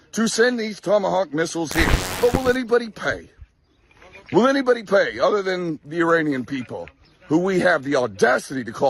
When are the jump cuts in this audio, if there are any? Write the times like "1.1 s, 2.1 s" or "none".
2.0 s